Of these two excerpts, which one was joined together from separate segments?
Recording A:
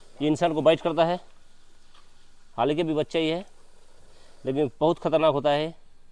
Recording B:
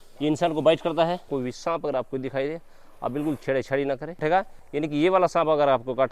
B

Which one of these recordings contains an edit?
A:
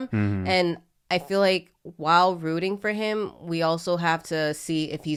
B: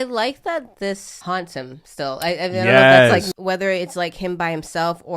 B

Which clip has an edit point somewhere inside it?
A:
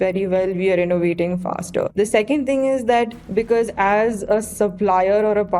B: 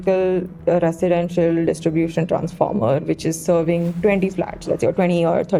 A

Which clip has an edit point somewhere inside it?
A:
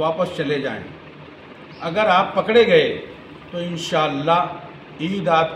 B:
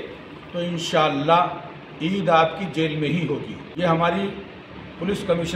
B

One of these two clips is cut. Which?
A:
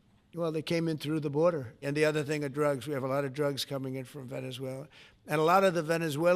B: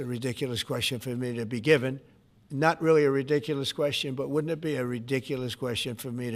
A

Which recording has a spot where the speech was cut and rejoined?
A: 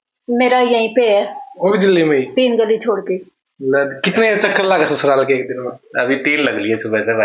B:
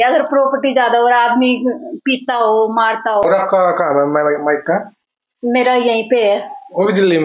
B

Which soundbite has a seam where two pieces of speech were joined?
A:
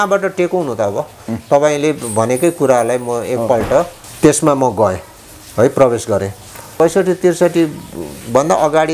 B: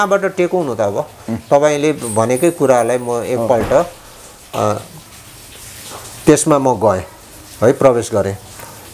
A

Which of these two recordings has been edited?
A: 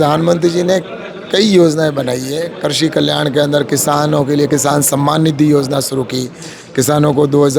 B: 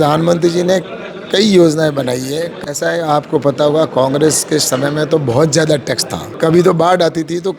B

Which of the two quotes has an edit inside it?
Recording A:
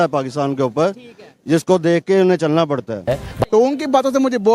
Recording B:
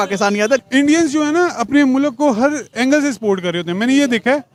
A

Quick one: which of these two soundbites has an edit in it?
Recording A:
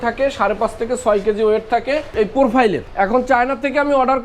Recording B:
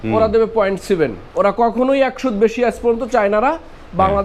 A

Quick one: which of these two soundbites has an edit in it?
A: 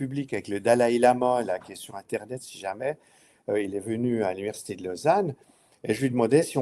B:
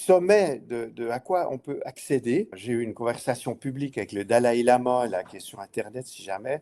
B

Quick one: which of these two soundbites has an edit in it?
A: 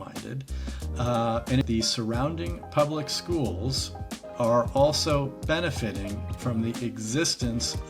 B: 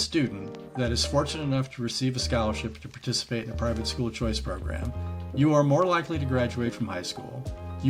A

